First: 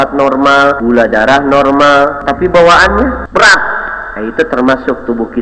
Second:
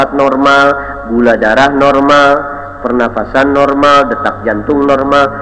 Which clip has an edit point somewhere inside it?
first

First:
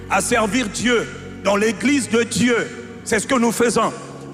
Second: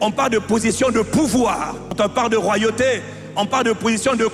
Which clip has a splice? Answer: second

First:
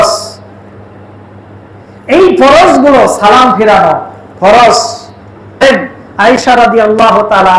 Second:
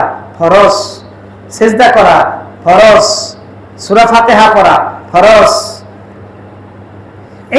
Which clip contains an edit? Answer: first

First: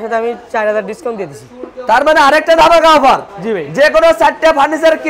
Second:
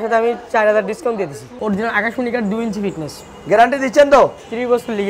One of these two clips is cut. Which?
second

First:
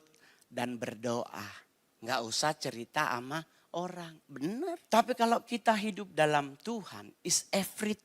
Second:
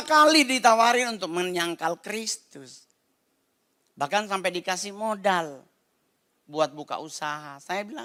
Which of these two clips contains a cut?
first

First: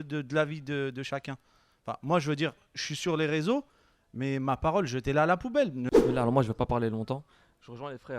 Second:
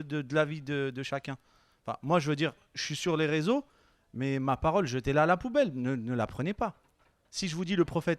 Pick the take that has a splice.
first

